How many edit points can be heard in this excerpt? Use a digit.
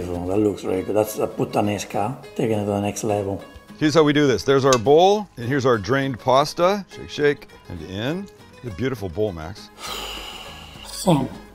2